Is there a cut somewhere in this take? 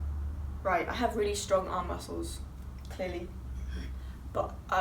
no; 0 cuts

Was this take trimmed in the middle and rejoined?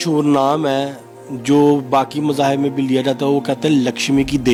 no; 0 cuts

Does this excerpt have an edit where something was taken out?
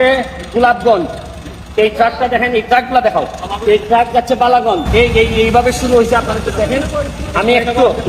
yes; 1 cut; at 4.8 s

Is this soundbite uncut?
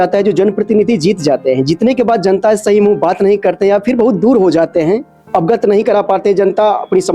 yes; 0 cuts

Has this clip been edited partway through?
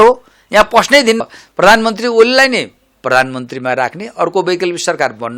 yes; 1 cut; at 1.2 s

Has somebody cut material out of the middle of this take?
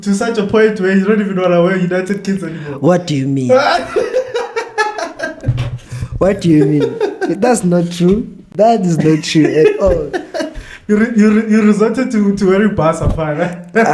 no; 0 cuts

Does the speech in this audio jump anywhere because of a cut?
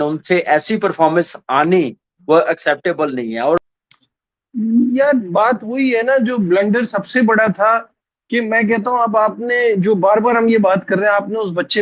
yes; 1 cut; at 3.6 s

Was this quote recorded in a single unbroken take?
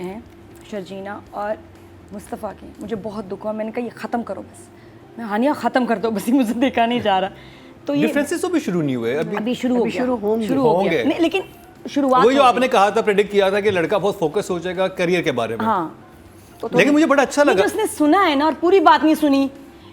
yes; 0 cuts

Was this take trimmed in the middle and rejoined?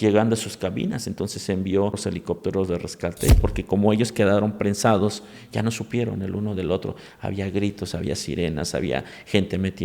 yes; 2 cuts; at 2.0 s, 3.4 s

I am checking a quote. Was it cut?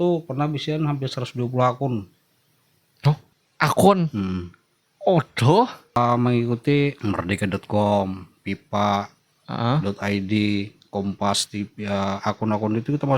yes; 3 cuts; at 3.4 s, 6.0 s, 7.0 s

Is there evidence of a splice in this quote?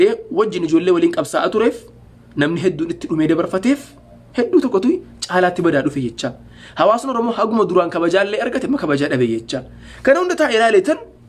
no; 0 cuts

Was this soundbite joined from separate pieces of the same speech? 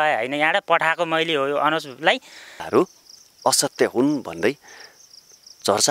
yes; 1 cut; at 2.6 s

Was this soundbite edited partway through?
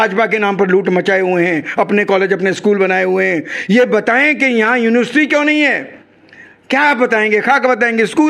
no; 0 cuts

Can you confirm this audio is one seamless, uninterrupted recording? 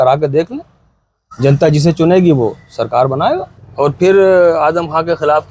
no; 1 cut; at 3.6 s

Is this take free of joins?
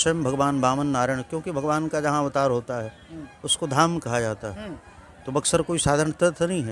yes; 0 cuts

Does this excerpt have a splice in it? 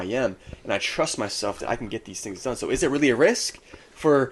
no; 0 cuts

